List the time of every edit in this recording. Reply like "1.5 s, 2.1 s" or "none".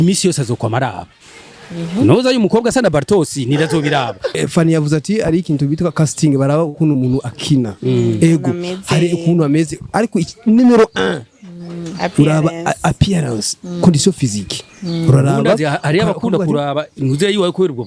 4.4 s

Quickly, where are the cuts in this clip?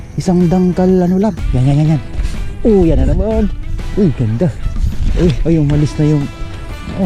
1.5 s

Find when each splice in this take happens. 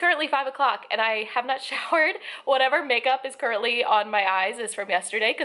none

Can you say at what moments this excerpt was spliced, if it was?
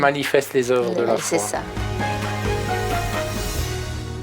1.9 s

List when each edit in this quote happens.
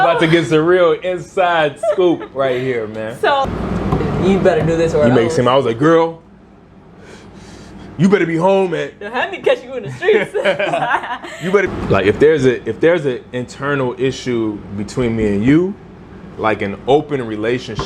3.5 s, 11.7 s

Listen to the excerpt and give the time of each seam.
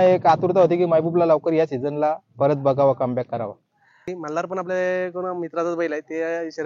4.1 s

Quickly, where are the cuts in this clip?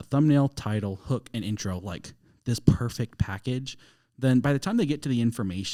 none

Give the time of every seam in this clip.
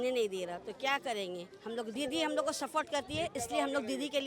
1.9 s

